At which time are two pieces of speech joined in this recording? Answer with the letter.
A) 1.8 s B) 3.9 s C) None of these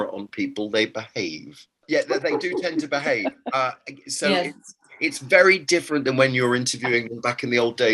A